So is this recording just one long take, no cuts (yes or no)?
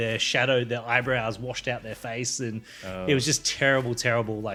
yes